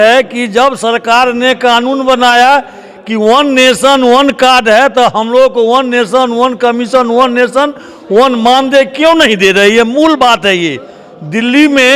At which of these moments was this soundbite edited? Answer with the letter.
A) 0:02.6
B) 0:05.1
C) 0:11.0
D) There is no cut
C